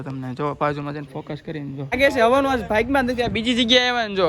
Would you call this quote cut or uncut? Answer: cut